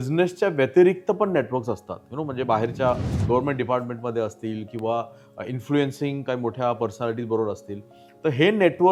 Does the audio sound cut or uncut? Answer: uncut